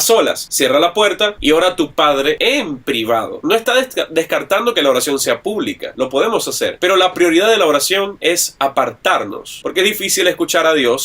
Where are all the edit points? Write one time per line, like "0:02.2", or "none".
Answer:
0:03.4